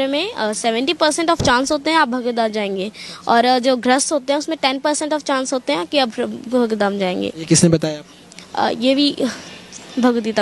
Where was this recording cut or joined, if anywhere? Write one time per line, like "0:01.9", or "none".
none